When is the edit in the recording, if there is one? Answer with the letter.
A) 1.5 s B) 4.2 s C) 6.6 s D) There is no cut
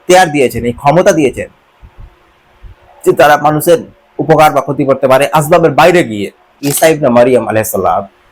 C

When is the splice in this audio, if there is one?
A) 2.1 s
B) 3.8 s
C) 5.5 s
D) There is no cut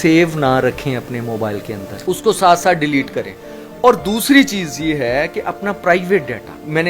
D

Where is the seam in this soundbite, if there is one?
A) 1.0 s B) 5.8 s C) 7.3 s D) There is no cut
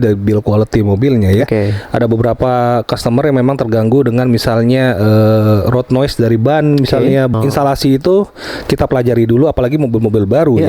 C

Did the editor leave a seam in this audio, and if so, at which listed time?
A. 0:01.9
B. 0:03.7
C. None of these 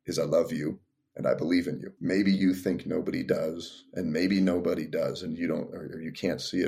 A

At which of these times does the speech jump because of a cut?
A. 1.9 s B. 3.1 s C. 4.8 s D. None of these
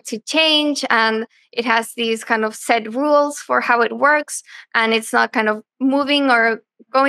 D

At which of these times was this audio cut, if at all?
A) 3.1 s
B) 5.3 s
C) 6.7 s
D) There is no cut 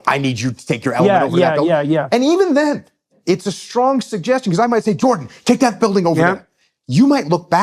A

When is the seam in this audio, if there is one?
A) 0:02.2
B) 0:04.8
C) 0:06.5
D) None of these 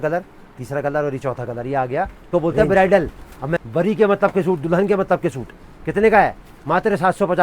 A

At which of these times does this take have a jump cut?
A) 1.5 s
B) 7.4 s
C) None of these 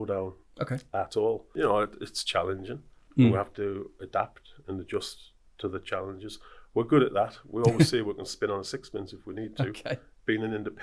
A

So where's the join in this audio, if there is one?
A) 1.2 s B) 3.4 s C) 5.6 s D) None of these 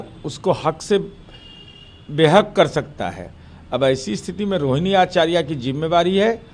D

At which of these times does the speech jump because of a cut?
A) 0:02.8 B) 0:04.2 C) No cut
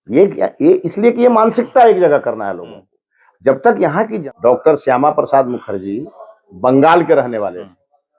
B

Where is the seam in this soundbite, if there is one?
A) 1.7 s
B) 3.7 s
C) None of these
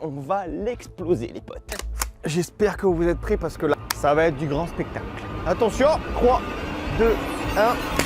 B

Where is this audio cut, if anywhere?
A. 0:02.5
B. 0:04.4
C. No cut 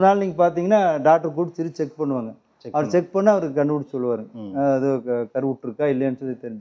C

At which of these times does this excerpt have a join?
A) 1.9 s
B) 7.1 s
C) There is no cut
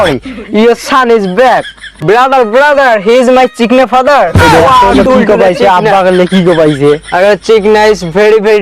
A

